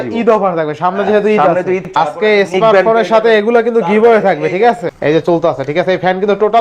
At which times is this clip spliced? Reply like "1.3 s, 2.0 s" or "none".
1.8 s, 4.9 s